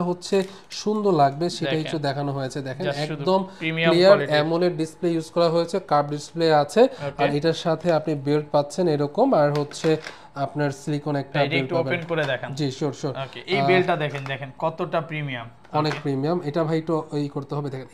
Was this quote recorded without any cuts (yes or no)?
yes